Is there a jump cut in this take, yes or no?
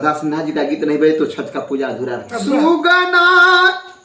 yes